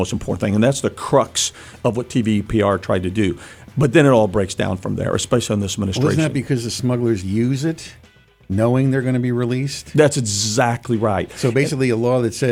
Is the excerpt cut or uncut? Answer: uncut